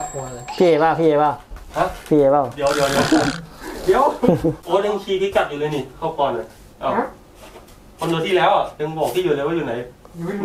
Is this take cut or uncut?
cut